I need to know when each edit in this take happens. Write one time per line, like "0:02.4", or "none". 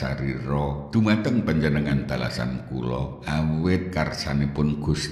0:03.2